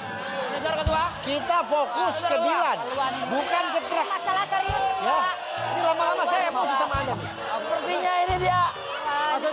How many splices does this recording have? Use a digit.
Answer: 0